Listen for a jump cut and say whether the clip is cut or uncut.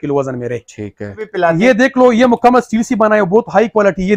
cut